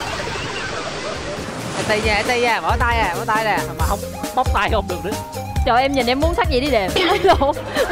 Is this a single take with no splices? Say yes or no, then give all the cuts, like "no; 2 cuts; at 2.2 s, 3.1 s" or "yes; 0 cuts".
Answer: no; 1 cut; at 1.8 s